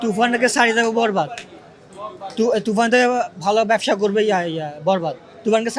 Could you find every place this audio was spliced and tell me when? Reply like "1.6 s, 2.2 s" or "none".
none